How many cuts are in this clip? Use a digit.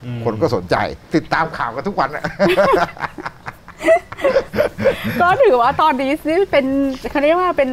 1